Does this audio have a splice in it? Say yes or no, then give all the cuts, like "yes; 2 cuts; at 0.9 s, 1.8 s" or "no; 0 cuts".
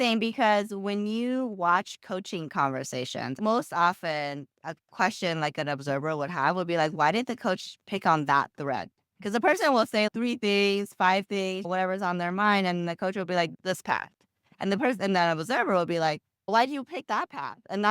yes; 3 cuts; at 3.4 s, 10.1 s, 11.7 s